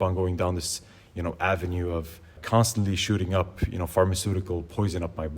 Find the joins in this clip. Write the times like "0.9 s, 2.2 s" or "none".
2.4 s